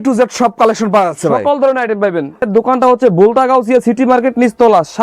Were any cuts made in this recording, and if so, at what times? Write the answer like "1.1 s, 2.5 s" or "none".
2.5 s